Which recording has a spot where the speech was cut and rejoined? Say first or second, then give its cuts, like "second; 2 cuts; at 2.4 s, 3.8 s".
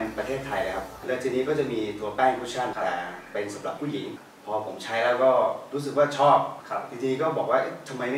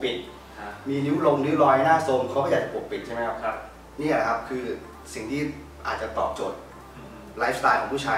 first; 4 cuts; at 1.0 s, 2.7 s, 4.3 s, 6.6 s